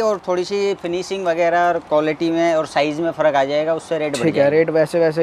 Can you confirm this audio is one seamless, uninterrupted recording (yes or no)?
yes